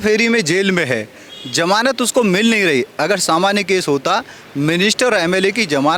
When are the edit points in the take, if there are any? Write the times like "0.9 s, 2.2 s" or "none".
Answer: none